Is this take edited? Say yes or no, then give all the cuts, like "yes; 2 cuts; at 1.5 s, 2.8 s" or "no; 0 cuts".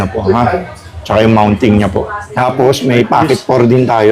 yes; 1 cut; at 2.3 s